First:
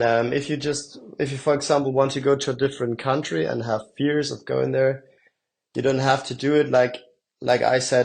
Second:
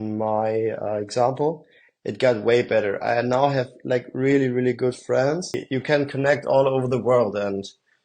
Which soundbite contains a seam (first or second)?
second